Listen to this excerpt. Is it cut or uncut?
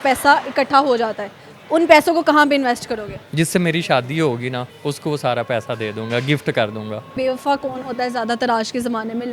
cut